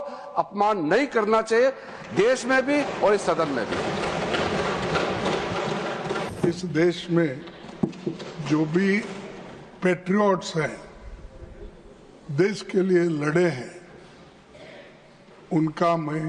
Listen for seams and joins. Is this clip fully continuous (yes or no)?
no